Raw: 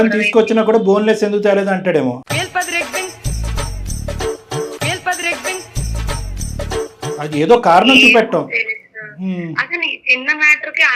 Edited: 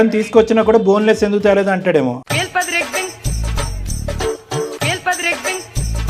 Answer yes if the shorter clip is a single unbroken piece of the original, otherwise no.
yes